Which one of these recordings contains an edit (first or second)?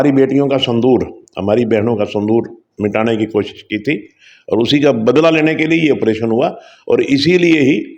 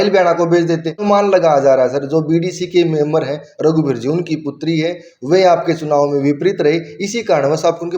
second